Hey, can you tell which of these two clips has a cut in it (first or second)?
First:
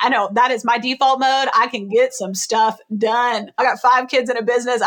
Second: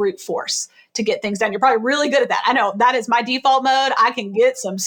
first